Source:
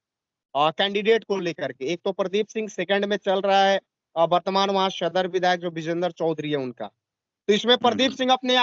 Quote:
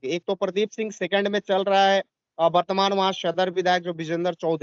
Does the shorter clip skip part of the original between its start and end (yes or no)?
no